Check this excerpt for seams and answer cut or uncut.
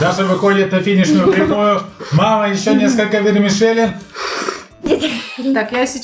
cut